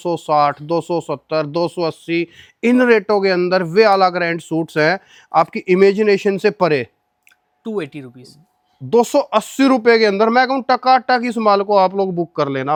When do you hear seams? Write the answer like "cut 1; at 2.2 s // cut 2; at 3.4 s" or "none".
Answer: none